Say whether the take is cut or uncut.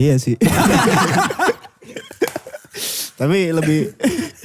uncut